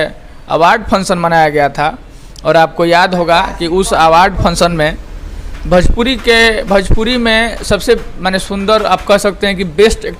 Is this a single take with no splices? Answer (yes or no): yes